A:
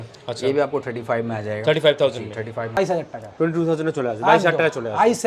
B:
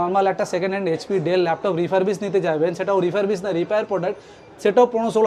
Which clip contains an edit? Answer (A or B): A